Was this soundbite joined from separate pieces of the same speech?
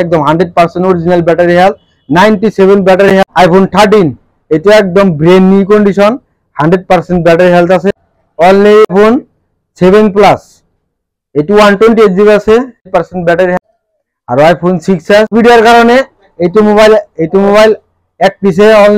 yes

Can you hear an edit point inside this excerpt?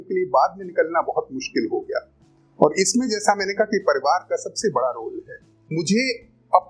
yes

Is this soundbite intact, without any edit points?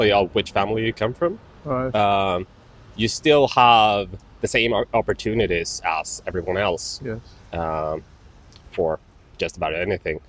yes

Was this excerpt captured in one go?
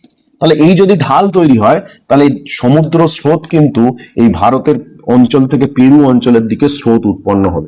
yes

